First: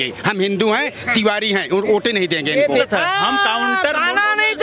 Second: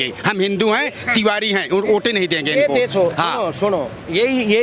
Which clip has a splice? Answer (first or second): first